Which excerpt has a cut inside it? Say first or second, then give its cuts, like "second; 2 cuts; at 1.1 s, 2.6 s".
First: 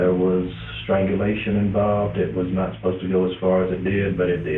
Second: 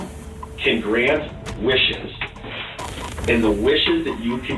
first; 1 cut; at 2.1 s